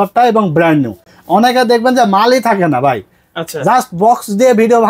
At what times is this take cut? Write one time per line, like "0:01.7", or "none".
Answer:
none